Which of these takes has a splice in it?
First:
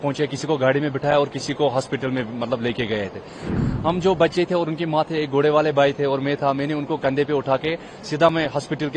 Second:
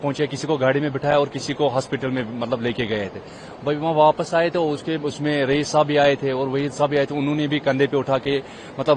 first; 1 cut; at 3.5 s

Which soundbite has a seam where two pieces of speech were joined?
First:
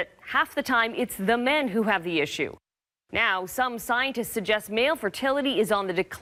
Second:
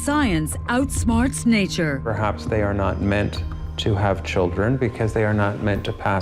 second; 1 cut; at 1.0 s

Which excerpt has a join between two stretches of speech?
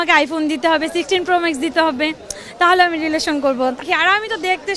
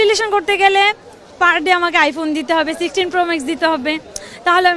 first; 1 cut; at 3.8 s

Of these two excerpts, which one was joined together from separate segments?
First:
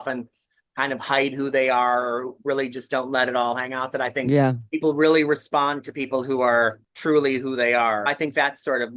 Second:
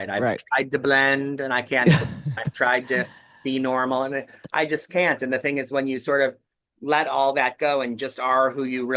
first; 2 cuts; at 6.9 s, 8.1 s

